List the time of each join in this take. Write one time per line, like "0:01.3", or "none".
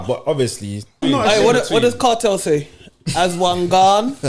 0:01.0